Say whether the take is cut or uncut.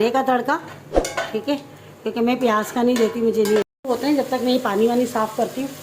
cut